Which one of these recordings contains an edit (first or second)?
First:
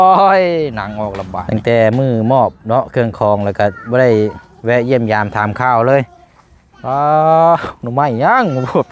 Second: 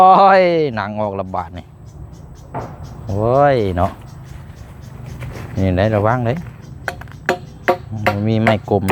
first